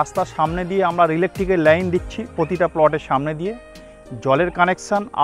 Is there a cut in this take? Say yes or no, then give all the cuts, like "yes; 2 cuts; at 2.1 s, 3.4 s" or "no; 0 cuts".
no; 0 cuts